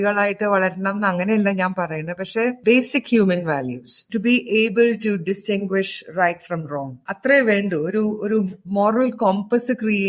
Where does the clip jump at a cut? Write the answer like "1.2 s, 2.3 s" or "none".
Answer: 2.6 s, 4.0 s, 7.0 s